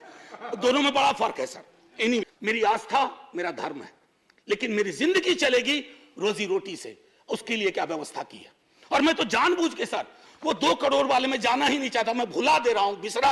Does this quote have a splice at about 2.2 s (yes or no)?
yes